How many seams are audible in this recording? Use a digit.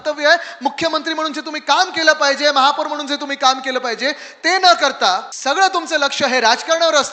1